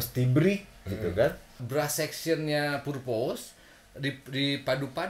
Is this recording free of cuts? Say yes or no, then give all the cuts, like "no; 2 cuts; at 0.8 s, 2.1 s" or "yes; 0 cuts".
no; 1 cut; at 1.6 s